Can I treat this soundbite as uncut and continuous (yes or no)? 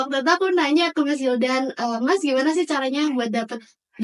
yes